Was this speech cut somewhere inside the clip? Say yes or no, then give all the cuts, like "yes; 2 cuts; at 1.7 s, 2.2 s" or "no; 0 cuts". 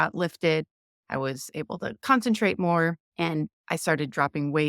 yes; 1 cut; at 3.0 s